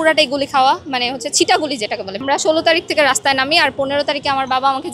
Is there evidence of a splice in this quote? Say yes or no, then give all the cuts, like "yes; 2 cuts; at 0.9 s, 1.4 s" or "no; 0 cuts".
yes; 1 cut; at 2.2 s